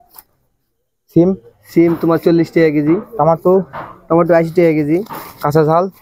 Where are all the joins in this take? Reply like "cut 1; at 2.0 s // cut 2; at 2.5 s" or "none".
none